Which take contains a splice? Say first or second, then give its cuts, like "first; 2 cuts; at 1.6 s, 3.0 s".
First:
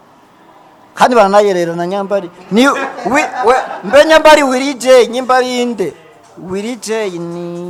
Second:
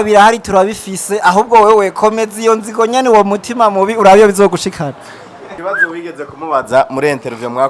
second; 1 cut; at 5.5 s